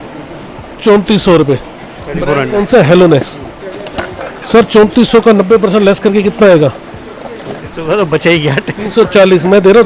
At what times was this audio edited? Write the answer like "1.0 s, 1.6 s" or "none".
none